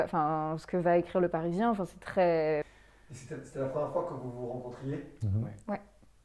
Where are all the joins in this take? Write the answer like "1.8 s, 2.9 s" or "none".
2.7 s